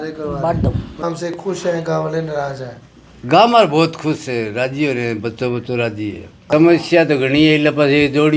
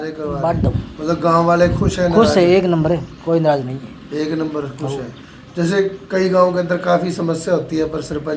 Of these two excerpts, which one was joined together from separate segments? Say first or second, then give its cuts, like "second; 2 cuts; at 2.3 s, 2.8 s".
first; 2 cuts; at 0.9 s, 6.4 s